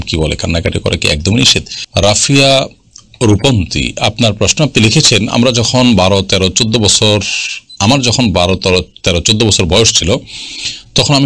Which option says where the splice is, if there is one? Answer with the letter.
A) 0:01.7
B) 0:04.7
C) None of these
A